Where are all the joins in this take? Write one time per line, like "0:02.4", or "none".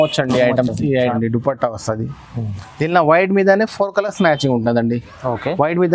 0:01.1